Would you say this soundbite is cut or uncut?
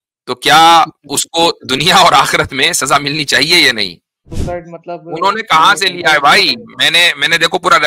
cut